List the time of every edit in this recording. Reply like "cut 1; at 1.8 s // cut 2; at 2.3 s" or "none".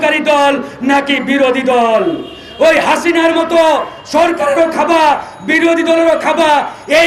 none

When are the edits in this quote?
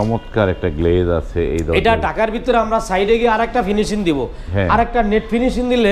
none

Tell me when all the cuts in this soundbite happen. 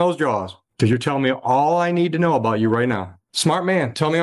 cut 1; at 3.3 s

